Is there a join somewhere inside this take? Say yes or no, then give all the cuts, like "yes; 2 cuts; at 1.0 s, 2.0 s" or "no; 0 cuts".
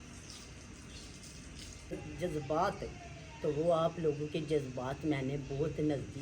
yes; 1 cut; at 2.0 s